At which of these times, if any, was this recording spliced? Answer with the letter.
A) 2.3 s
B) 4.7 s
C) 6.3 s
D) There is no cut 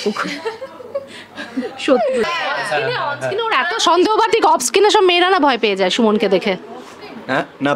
A